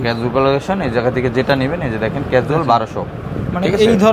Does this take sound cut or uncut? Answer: uncut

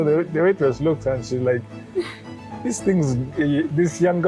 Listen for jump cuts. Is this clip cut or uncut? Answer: uncut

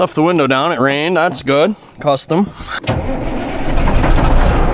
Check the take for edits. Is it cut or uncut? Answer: cut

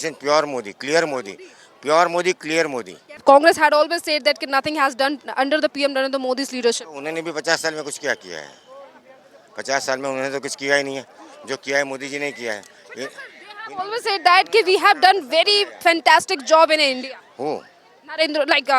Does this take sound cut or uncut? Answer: cut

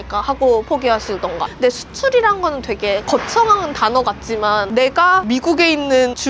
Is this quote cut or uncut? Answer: cut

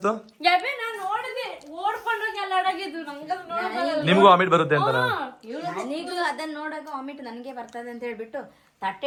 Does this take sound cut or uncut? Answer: uncut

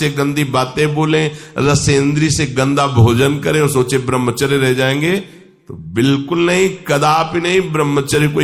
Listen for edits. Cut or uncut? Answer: uncut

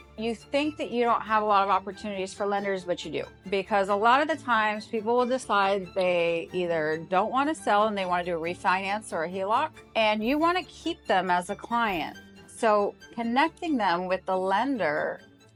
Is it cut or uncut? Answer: uncut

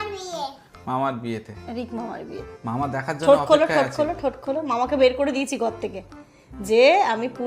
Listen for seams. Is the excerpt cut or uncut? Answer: cut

